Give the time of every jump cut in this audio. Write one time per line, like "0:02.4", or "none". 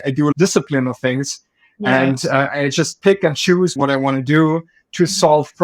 none